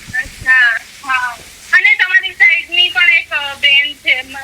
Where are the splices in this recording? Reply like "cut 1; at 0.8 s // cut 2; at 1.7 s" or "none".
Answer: none